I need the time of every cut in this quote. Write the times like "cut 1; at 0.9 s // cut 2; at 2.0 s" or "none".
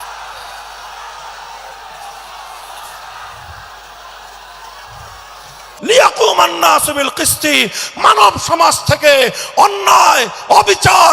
cut 1; at 5.6 s

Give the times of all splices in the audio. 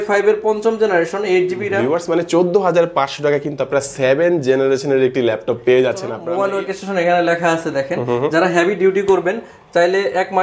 cut 1; at 1.8 s // cut 2; at 6.1 s

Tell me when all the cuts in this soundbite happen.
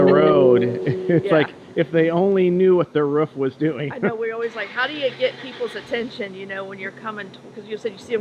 none

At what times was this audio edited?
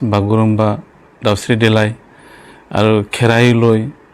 none

